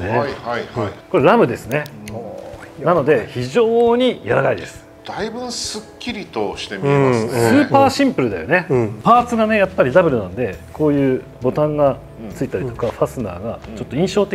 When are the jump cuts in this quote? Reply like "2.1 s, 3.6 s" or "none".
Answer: 1.0 s, 8.9 s